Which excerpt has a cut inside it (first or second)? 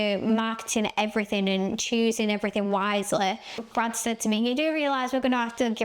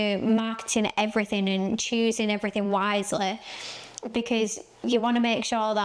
first